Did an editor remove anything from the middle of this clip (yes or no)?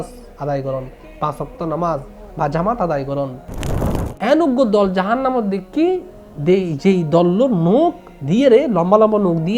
yes